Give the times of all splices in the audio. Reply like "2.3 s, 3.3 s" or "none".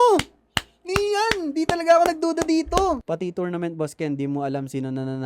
3.0 s